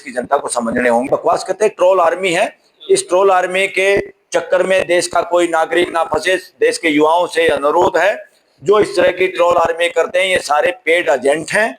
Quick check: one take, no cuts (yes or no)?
no